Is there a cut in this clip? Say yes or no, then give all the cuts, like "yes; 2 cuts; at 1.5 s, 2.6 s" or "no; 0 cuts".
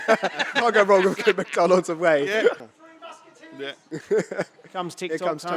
yes; 1 cut; at 2.6 s